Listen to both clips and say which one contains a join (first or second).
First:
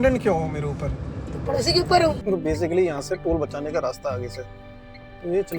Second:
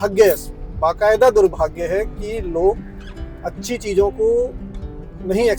first